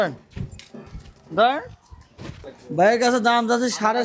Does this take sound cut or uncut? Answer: cut